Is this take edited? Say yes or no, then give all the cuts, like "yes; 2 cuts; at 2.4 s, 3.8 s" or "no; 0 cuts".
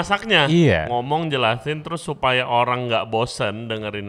no; 0 cuts